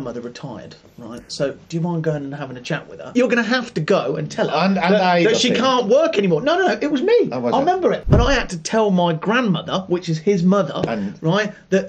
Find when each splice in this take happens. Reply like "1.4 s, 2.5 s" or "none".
3.1 s, 8.0 s